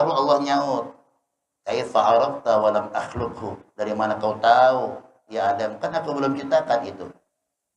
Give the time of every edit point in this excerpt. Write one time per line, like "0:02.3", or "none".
none